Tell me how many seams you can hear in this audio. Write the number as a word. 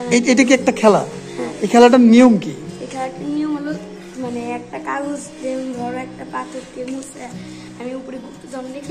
zero